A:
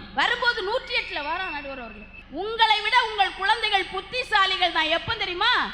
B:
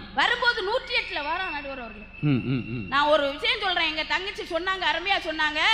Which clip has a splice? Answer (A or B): A